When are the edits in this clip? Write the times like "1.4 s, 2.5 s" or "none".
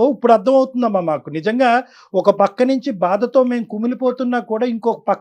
none